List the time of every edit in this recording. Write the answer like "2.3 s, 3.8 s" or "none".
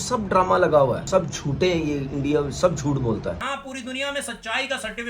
1.1 s, 3.4 s